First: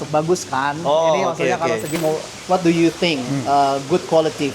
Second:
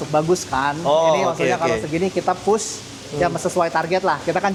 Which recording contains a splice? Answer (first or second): first